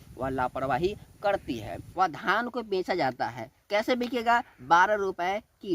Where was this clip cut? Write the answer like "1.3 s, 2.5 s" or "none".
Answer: 1.8 s